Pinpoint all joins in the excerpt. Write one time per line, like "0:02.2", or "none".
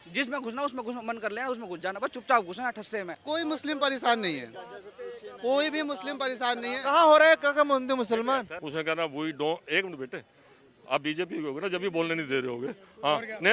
0:03.2
0:08.6